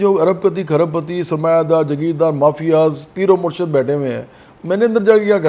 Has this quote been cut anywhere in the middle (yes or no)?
no